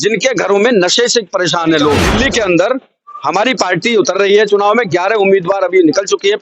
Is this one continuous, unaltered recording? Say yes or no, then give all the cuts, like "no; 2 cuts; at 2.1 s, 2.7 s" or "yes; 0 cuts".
no; 1 cut; at 2.1 s